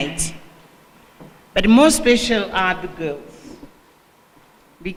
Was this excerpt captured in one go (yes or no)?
yes